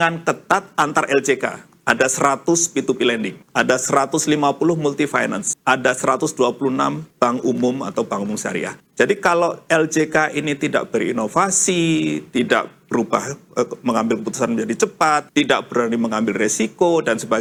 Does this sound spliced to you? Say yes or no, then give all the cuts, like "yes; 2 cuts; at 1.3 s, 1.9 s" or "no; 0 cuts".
no; 0 cuts